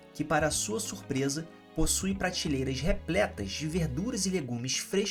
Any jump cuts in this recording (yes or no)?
no